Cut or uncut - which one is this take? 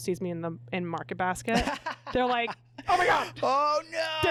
uncut